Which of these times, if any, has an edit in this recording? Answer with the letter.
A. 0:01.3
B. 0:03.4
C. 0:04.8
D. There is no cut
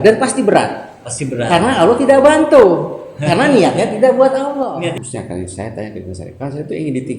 C